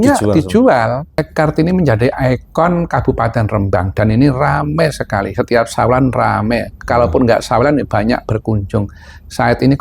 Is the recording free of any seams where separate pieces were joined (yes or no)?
no